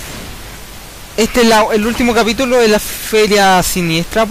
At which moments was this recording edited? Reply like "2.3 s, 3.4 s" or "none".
3.4 s